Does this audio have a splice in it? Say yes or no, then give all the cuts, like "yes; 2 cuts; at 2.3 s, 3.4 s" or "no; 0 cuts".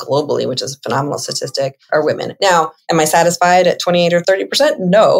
yes; 3 cuts; at 1.8 s, 2.8 s, 4.2 s